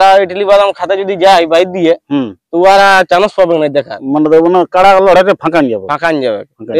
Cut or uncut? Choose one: uncut